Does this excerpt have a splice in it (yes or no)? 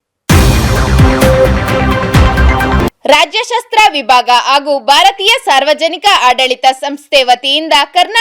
yes